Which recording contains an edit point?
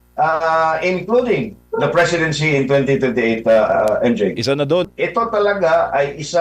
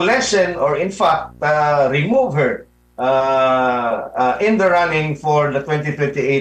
first; 1 cut; at 4.9 s

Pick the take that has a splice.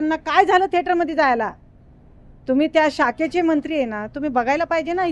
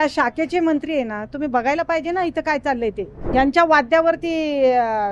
second; 1 cut; at 3.3 s

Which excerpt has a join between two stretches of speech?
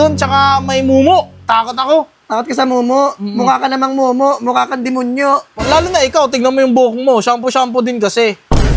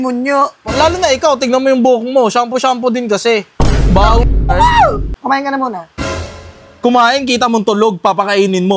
second; 1 cut; at 5.1 s

